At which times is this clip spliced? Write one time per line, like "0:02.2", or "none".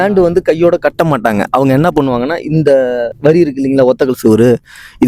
0:03.1